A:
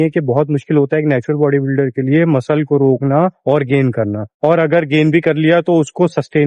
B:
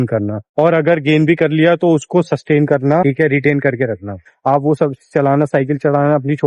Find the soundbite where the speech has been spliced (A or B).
B